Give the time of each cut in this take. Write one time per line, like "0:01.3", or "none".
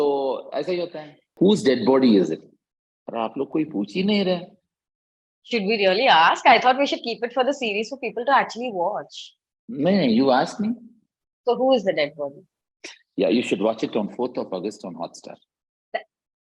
0:01.2

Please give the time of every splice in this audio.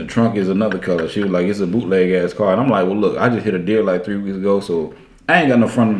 none

